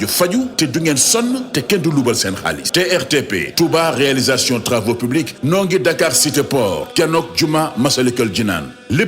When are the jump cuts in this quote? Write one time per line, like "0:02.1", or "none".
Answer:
0:02.6